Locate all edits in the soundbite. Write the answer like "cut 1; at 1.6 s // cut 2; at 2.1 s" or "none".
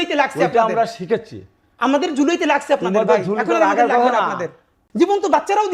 cut 1; at 4.8 s